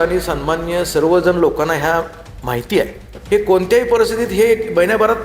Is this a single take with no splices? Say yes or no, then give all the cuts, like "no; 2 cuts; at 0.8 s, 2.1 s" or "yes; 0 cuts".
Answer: no; 1 cut; at 3.1 s